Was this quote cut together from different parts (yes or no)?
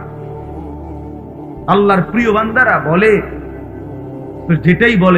no